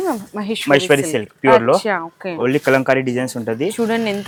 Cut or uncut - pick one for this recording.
uncut